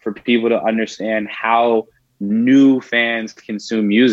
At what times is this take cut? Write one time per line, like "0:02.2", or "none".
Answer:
none